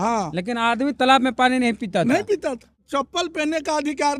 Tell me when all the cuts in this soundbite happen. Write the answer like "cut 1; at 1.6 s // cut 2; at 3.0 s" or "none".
cut 1; at 2.8 s